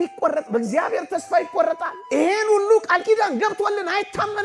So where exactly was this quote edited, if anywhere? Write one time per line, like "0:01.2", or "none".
0:01.9